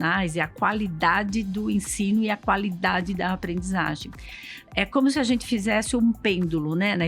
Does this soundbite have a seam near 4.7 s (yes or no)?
no